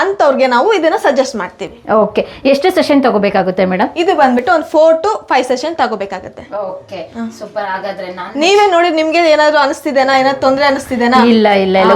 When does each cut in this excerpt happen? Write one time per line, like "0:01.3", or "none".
none